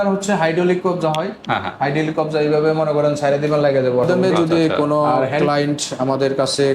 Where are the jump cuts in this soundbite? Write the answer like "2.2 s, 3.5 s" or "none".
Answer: 4.1 s